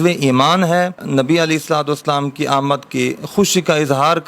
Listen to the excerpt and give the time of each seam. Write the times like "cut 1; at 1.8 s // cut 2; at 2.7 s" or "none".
cut 1; at 1.0 s